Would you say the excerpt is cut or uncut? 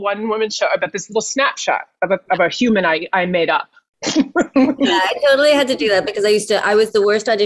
cut